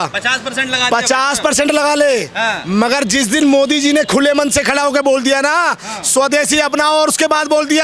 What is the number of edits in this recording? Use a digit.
0